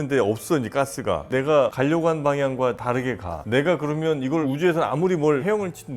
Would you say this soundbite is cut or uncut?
cut